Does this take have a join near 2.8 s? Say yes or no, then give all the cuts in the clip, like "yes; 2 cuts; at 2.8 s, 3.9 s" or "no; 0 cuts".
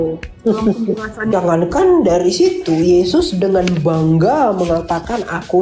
no; 1 cut; at 1.3 s